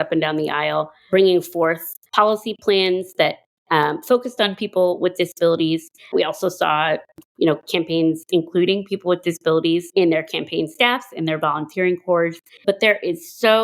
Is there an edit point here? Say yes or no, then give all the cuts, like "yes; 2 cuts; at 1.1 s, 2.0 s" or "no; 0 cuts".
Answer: yes; 3 cuts; at 1.1 s, 9.9 s, 12.5 s